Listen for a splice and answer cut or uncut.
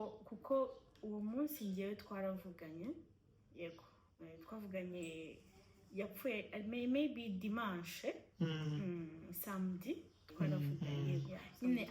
cut